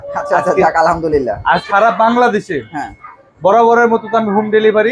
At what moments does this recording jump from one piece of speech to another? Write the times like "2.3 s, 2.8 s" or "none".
1.6 s

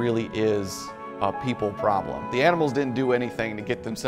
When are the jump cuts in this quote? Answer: 2.2 s

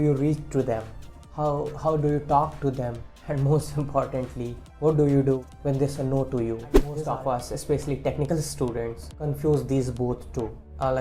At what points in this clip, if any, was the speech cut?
6.9 s

